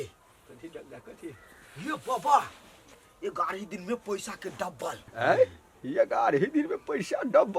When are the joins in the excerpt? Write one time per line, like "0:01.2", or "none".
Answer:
0:05.0